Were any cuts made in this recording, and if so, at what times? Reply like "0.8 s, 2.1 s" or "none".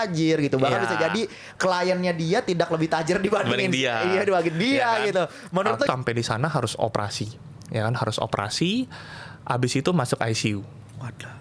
5.9 s